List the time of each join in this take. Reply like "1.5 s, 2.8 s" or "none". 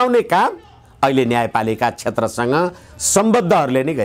none